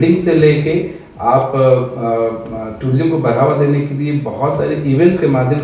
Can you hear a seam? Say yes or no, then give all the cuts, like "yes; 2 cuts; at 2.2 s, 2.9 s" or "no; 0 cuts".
no; 0 cuts